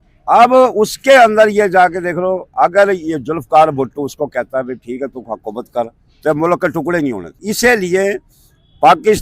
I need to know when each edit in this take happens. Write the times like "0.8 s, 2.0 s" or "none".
7.3 s

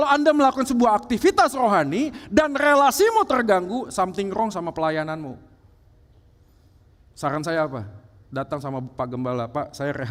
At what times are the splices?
none

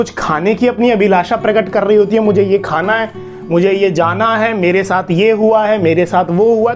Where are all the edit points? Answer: none

